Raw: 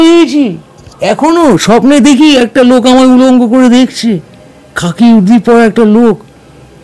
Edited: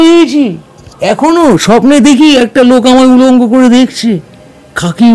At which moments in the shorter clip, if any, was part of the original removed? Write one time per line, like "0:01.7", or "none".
none